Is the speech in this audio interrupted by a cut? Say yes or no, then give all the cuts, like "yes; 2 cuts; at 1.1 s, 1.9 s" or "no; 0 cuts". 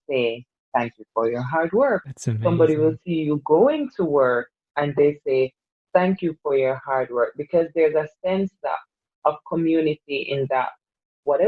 yes; 1 cut; at 2.2 s